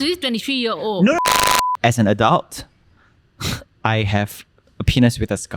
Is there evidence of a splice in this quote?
yes; 1 cut; at 1.3 s

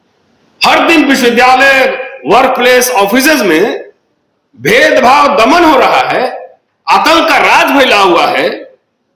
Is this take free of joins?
yes; 0 cuts

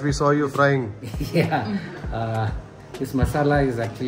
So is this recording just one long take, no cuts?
yes; 0 cuts

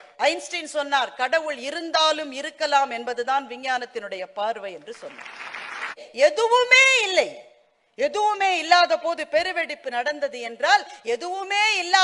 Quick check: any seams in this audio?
yes; 1 cut; at 6.0 s

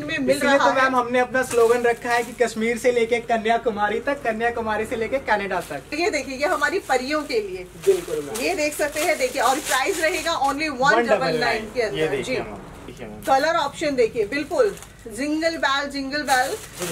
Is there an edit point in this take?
yes; 2 cuts; at 5.9 s, 12.9 s

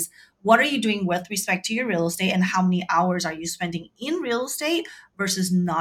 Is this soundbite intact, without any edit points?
yes; 0 cuts

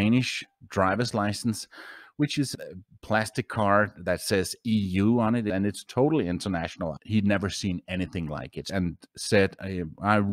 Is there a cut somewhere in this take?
yes; 3 cuts; at 5.5 s, 6.9 s, 8.6 s

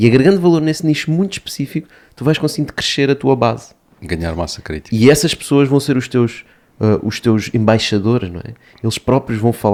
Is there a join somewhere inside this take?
no; 0 cuts

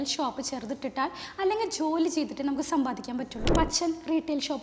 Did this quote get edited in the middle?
yes; 1 cut; at 3.5 s

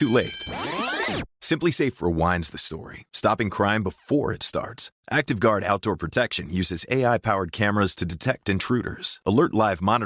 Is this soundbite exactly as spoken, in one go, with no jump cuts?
yes; 0 cuts

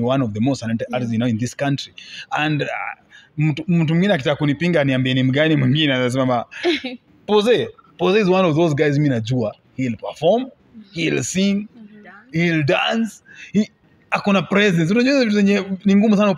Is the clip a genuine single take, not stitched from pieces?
yes; 0 cuts

